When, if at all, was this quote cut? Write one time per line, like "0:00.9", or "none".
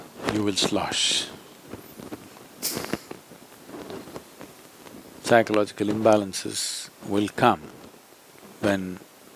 none